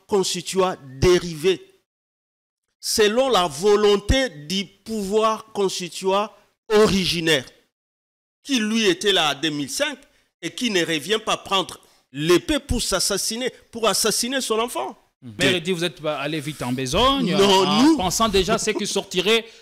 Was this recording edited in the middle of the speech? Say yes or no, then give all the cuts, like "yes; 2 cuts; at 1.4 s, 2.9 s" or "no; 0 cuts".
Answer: yes; 1 cut; at 15.3 s